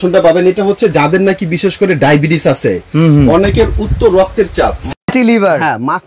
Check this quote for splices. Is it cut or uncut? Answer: uncut